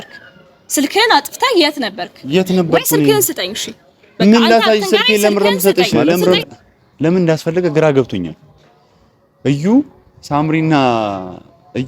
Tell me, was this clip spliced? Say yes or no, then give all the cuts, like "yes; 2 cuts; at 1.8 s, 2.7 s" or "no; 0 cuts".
yes; 1 cut; at 6.4 s